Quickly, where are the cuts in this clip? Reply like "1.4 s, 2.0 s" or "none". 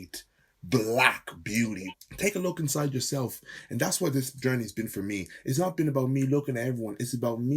1.8 s